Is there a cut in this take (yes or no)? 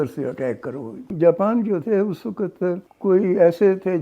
yes